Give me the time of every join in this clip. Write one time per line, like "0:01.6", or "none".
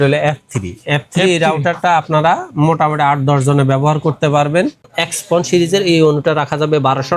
0:04.9